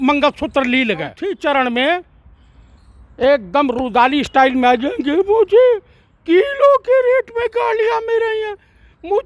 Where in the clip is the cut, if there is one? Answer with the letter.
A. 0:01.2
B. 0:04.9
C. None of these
A